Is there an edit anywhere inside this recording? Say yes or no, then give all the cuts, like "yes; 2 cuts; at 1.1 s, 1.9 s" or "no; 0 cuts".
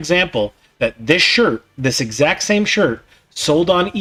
no; 0 cuts